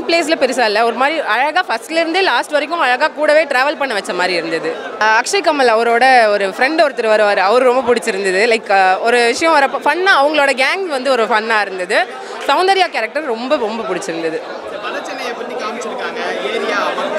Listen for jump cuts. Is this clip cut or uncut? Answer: uncut